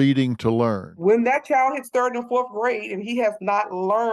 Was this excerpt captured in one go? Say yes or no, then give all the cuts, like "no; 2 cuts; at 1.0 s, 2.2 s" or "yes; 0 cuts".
no; 1 cut; at 1.0 s